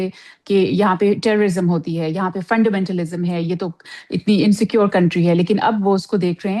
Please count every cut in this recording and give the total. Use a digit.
0